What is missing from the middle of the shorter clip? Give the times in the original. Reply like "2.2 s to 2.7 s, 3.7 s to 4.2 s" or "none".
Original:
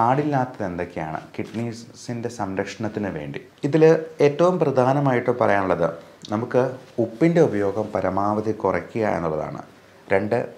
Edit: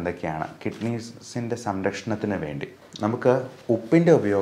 3.5 s to 6.1 s